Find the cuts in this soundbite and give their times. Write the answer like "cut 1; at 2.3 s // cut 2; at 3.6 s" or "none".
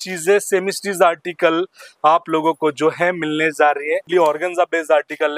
cut 1; at 4.1 s